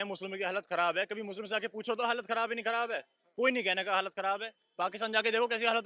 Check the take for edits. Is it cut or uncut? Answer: uncut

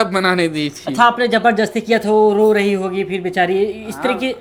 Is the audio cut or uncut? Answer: uncut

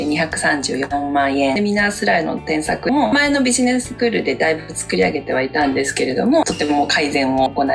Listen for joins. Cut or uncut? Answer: cut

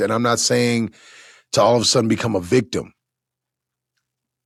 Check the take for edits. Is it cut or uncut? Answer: uncut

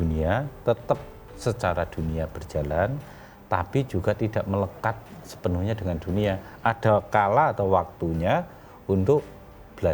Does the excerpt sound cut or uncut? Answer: uncut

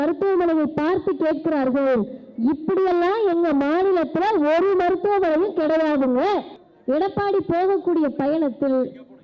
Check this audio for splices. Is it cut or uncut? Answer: cut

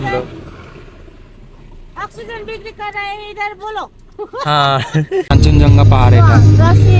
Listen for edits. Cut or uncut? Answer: cut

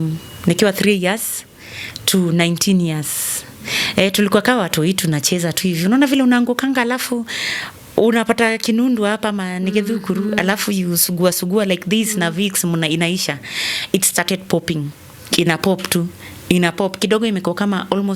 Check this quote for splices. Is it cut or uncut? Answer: uncut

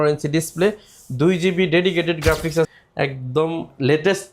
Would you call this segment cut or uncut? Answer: cut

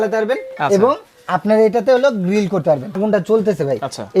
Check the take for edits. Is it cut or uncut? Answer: cut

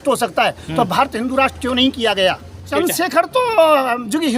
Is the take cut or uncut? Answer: cut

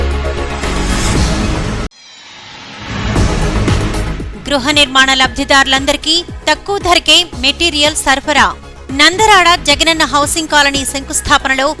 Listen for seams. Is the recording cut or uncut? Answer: uncut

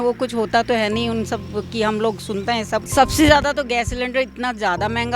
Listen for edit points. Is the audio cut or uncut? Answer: cut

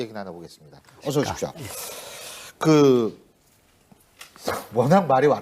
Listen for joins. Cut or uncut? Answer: uncut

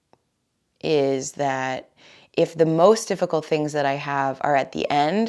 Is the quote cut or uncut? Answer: uncut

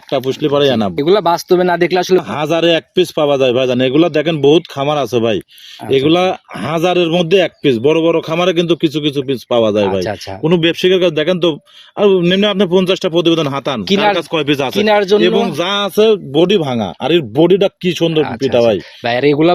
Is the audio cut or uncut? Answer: cut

